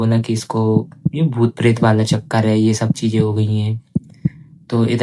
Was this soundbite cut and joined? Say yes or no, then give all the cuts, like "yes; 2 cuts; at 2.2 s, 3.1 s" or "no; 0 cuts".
no; 0 cuts